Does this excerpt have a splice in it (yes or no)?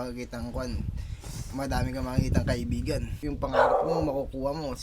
yes